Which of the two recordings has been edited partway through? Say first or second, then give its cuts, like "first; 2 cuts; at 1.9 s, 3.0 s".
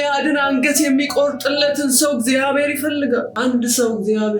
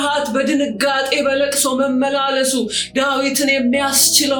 first; 1 cut; at 3.3 s